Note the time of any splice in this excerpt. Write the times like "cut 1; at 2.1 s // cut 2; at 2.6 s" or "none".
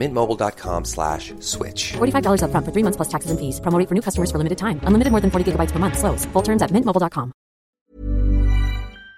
cut 1; at 7.7 s